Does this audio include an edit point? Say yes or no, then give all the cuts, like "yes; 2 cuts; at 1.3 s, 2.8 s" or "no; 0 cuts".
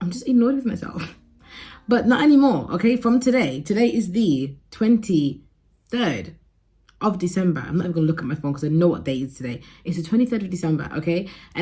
no; 0 cuts